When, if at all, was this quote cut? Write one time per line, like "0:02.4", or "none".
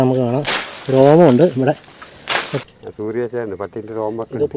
0:02.6